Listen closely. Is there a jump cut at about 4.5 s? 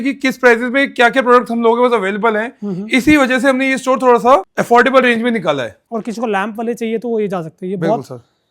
yes; 2 cuts; at 4.5 s, 5.8 s

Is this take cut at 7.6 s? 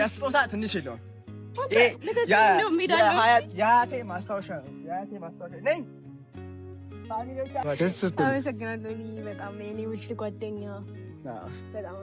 yes; 1 cut; at 7.6 s

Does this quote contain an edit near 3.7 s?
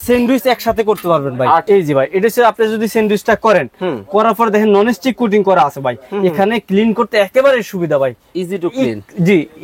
no; 1 cut; at 1.6 s

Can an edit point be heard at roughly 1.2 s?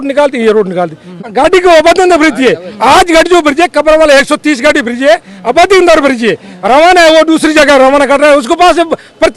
yes; 1 cut; at 1.2 s

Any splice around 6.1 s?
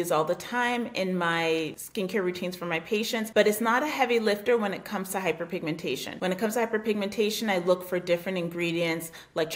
yes; 3 cuts; at 1.8 s, 3.3 s, 6.1 s

